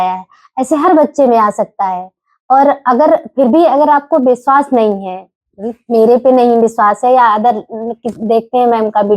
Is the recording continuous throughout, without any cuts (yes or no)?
yes